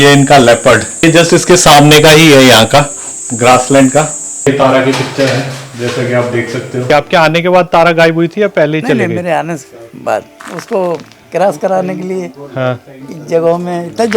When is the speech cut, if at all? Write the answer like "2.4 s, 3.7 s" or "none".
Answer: 1.0 s, 4.5 s, 6.9 s, 10.3 s